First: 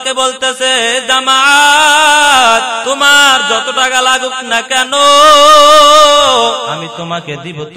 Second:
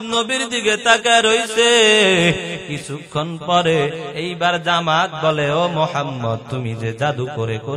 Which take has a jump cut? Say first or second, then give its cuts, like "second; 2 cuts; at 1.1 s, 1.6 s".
first; 2 cuts; at 2.8 s, 6.8 s